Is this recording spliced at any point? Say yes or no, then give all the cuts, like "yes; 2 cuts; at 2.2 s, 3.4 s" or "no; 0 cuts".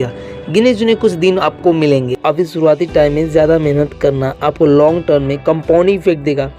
yes; 1 cut; at 2.1 s